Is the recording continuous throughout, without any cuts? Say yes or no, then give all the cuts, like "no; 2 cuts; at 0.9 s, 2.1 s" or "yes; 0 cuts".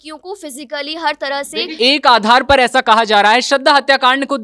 no; 1 cut; at 1.8 s